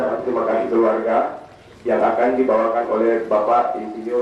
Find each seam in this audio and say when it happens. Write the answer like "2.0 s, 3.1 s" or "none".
none